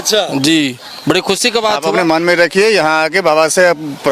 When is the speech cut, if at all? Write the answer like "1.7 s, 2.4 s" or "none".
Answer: 1.8 s